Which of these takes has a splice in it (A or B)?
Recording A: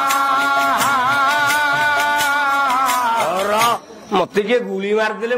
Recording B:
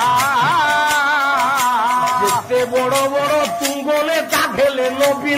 A